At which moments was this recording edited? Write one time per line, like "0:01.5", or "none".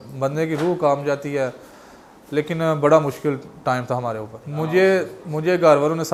none